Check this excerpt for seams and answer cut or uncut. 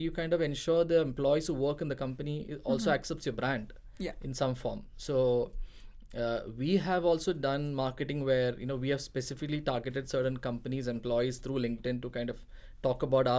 uncut